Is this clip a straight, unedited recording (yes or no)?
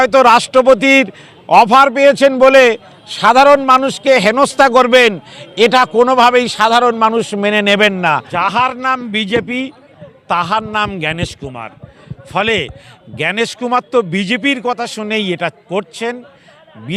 no